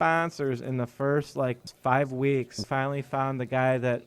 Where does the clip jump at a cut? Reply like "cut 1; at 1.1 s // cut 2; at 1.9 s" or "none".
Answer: cut 1; at 1.7 s // cut 2; at 2.6 s